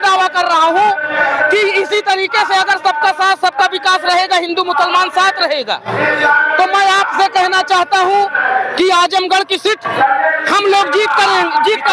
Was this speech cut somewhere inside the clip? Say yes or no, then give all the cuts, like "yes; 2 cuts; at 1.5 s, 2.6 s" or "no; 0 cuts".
no; 0 cuts